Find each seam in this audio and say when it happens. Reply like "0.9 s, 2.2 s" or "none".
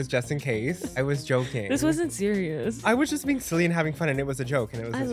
0.9 s, 2.8 s